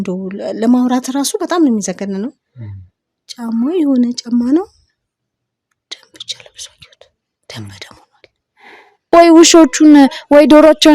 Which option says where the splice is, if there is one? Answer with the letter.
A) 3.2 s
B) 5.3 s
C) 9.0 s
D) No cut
C